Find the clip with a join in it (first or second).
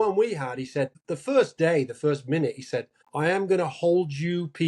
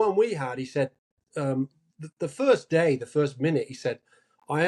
first